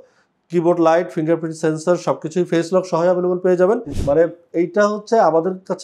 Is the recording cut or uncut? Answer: cut